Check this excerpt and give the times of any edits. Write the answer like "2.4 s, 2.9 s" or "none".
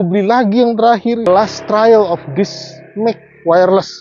1.3 s